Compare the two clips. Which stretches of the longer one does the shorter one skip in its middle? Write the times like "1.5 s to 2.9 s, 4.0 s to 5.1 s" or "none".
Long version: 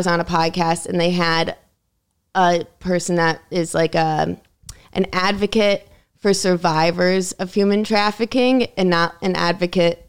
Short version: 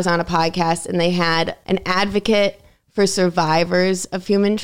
1.6 s to 4.8 s